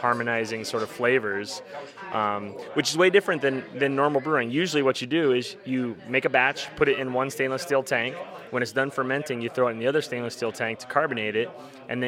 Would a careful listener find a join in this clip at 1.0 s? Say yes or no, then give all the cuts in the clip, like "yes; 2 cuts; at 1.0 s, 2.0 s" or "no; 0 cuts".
no; 0 cuts